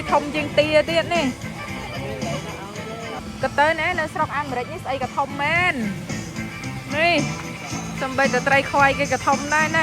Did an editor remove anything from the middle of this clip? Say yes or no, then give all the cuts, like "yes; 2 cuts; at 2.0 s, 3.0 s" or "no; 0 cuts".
yes; 1 cut; at 3.2 s